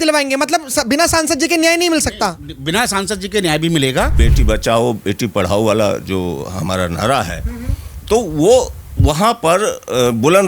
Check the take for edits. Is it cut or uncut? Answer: cut